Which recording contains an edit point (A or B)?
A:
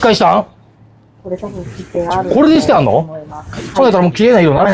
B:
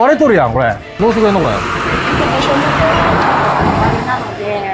B